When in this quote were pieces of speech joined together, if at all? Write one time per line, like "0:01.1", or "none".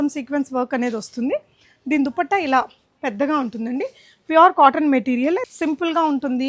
0:05.4